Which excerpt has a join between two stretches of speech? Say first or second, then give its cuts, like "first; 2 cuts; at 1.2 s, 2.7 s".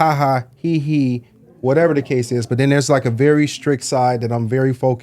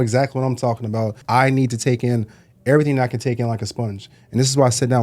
second; 1 cut; at 1.2 s